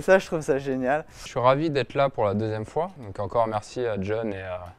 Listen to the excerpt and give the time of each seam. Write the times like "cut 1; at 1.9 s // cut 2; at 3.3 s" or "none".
cut 1; at 1.2 s // cut 2; at 3.0 s